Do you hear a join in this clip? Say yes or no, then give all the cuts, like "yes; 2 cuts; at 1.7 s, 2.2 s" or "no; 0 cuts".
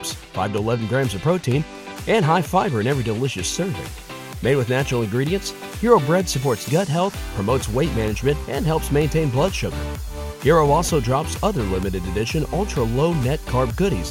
no; 0 cuts